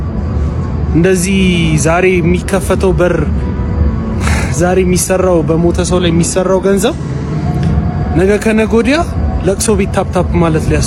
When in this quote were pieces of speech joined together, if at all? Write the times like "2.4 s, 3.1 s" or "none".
none